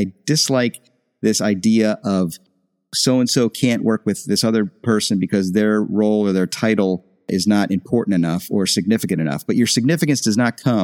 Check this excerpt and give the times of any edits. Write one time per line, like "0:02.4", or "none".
none